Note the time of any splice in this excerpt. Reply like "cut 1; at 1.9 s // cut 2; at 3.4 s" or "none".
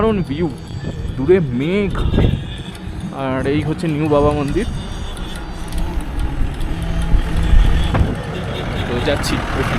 none